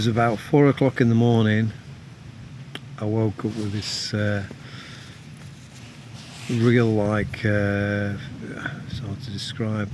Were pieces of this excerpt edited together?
no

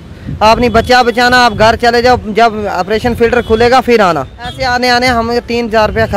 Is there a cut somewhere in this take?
yes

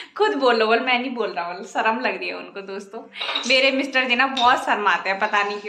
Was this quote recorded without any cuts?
yes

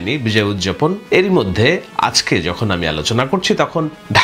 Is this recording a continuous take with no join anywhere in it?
no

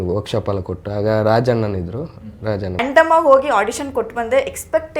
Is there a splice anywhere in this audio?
yes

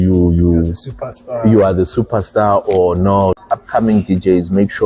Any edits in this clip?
yes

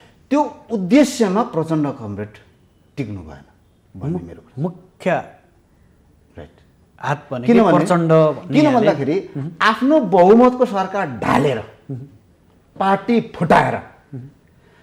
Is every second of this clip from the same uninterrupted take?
yes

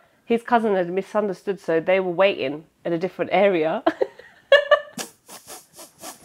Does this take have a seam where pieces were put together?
no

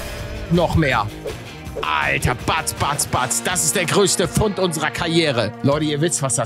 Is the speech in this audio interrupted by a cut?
yes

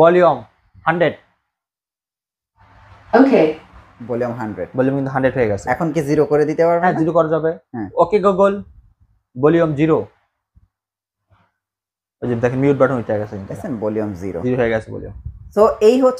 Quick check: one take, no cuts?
yes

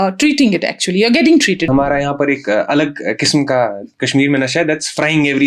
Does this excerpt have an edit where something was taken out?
yes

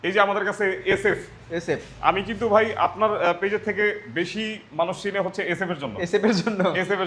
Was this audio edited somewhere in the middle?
no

